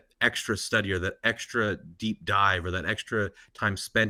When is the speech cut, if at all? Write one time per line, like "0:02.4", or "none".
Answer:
none